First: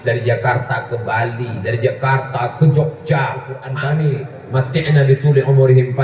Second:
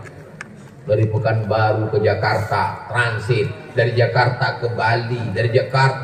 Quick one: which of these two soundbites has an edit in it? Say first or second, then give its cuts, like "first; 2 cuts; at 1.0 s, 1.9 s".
first; 1 cut; at 3.6 s